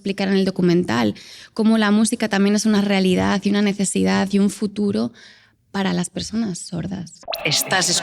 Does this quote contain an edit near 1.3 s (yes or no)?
no